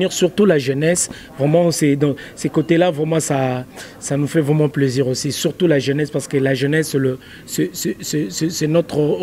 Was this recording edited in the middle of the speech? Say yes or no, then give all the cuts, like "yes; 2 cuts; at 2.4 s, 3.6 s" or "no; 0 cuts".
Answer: no; 0 cuts